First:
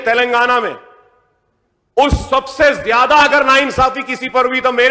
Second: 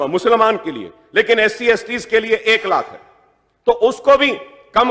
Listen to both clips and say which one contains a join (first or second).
second